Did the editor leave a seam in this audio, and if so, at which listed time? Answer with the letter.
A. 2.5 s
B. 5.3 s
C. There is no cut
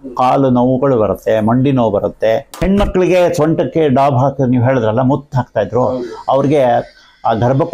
A